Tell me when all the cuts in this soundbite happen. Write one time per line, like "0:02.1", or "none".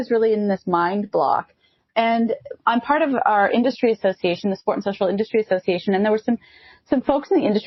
none